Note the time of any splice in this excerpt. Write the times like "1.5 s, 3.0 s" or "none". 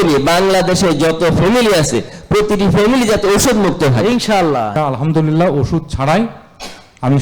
4.7 s